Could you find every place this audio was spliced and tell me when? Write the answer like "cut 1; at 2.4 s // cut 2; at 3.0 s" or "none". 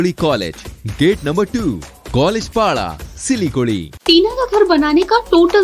cut 1; at 3.9 s